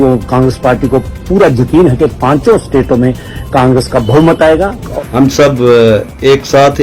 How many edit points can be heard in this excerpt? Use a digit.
1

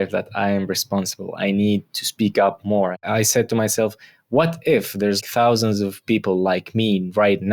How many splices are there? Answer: 1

